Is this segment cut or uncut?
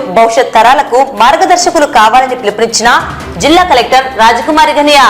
uncut